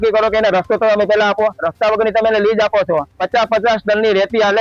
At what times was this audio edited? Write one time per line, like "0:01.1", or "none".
0:03.2